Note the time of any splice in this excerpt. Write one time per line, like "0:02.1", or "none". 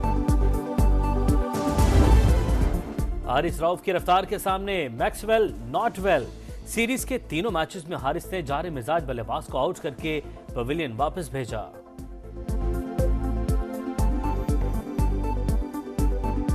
0:02.5